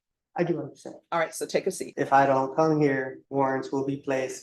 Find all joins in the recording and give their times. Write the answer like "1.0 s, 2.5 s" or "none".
1.8 s, 3.2 s